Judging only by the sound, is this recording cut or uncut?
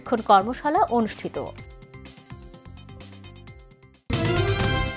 cut